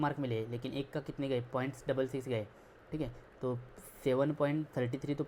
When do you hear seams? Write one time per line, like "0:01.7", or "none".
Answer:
none